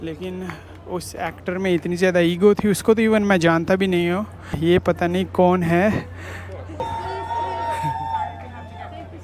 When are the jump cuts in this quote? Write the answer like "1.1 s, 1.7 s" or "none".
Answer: 4.6 s, 6.8 s